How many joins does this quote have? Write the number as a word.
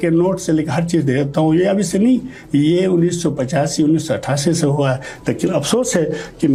zero